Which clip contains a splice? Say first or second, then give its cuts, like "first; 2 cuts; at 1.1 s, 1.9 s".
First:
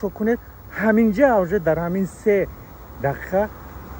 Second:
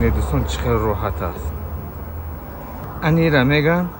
second; 1 cut; at 2.8 s